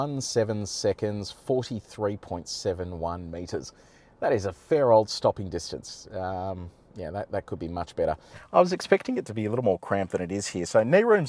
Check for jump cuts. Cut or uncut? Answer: cut